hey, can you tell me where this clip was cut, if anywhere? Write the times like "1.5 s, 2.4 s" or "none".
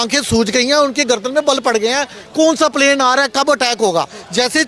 none